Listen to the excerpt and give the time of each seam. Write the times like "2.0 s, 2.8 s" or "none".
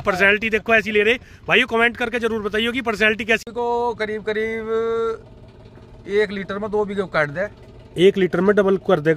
3.5 s

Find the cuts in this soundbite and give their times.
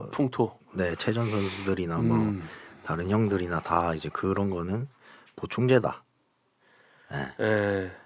none

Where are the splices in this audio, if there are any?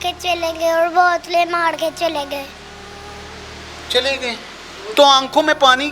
none

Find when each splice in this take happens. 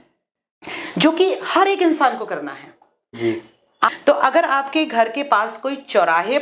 3.9 s

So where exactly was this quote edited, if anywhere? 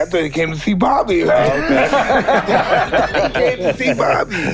none

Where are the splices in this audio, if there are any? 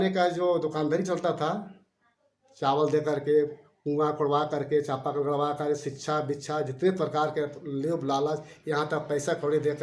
none

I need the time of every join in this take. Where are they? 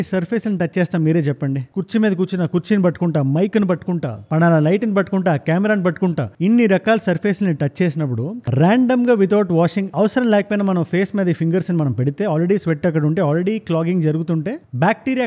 none

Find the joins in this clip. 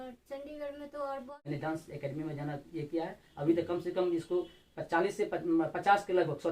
1.3 s

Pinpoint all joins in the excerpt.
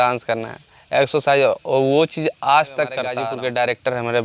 3.2 s

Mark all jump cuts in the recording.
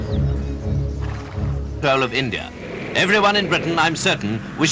none

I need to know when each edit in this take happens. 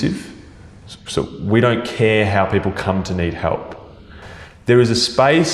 none

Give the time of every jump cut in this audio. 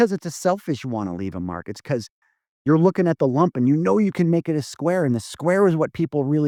none

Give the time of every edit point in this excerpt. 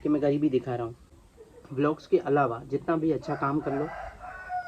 1.2 s

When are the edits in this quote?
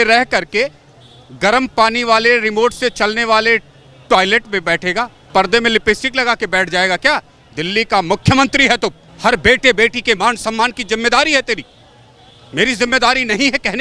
5.2 s, 9.1 s

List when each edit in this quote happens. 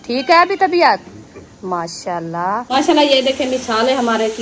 2.7 s

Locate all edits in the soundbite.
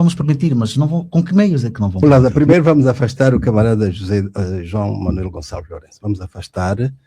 2.0 s

